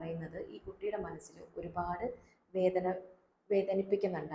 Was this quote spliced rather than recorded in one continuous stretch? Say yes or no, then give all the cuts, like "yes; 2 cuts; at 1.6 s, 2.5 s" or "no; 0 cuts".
no; 0 cuts